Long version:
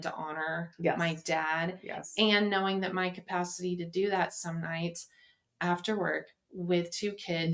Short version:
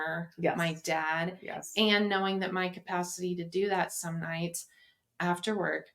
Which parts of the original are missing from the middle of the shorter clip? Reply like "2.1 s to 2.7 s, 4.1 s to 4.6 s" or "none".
none